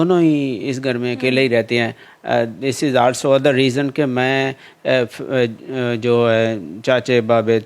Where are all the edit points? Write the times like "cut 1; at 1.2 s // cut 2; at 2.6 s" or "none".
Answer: none